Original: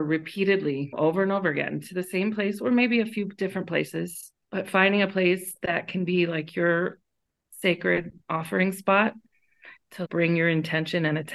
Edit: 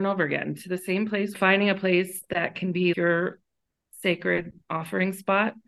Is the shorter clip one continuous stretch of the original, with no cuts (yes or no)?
no